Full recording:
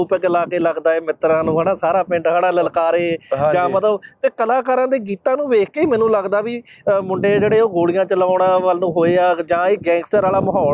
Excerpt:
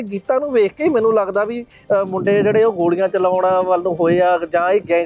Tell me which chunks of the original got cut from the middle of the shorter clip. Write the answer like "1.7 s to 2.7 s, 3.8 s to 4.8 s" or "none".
none